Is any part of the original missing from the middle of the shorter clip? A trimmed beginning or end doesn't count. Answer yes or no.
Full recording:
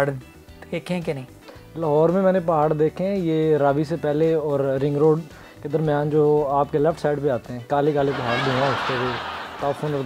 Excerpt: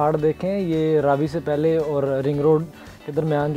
no